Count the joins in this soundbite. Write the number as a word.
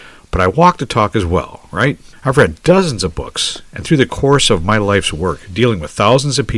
one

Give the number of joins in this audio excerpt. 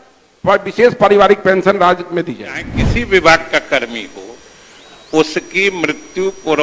one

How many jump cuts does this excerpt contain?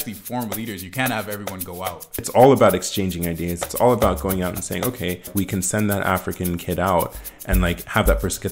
two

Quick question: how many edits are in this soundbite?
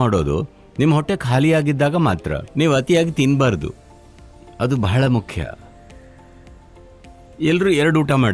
one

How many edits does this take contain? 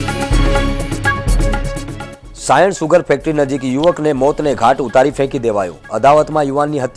one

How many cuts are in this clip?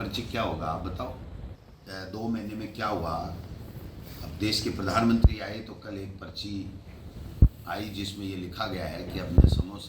one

